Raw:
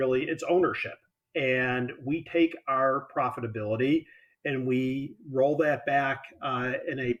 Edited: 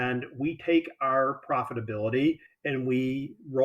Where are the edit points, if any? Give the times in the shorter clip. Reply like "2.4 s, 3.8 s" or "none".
2.5 s

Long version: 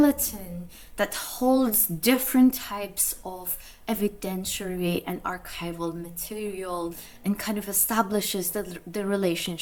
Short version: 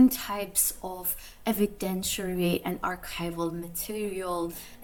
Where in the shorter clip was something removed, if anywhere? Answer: none

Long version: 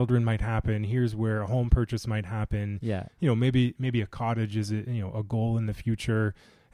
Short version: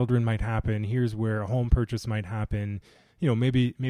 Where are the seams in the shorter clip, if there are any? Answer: none

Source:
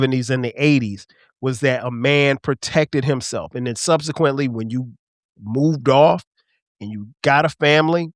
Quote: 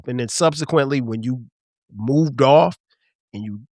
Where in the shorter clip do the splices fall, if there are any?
none

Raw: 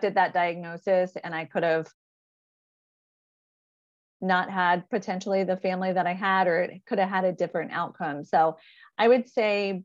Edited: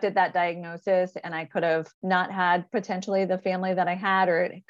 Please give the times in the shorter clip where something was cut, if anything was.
1.9 s

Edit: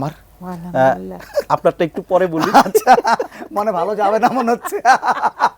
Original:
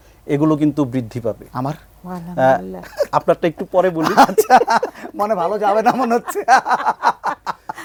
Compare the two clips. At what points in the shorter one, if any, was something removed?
none

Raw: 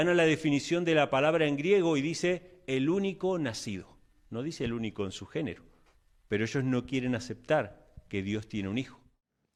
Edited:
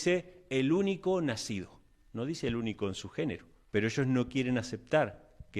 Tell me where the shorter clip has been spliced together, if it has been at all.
3.5 s

